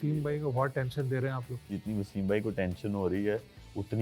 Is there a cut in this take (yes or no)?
yes